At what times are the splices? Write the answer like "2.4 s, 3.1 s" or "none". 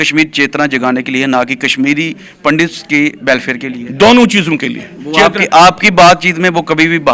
none